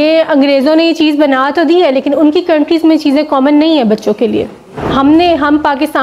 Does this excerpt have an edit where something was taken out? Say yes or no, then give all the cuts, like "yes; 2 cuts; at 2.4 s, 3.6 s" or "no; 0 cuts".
no; 0 cuts